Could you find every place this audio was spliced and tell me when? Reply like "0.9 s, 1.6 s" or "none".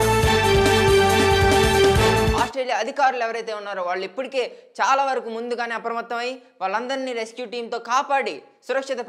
0.9 s